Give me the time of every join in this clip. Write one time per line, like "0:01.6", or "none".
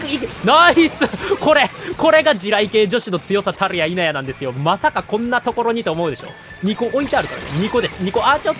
none